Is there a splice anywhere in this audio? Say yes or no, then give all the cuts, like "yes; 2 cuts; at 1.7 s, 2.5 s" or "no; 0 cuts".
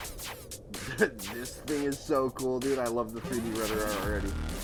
no; 0 cuts